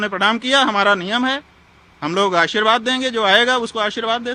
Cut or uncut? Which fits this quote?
uncut